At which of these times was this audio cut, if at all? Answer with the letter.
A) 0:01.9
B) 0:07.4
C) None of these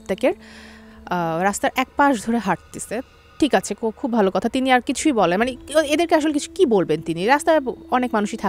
C